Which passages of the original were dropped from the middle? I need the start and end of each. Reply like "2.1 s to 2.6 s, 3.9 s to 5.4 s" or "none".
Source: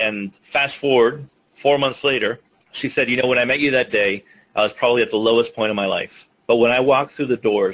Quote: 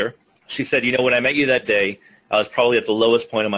none